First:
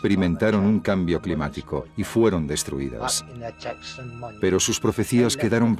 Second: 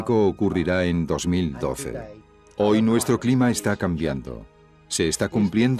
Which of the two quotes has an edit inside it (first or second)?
first